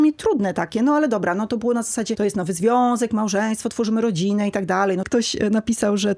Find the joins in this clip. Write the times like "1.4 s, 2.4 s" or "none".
2.1 s, 5.1 s